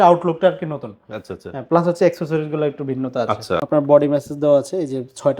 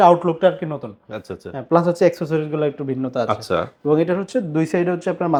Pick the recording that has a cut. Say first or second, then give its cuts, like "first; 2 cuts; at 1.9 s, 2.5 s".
first; 1 cut; at 3.6 s